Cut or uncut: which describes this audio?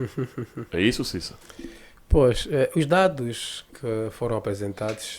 uncut